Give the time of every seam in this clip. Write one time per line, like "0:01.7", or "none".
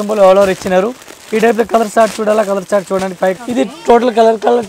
0:03.4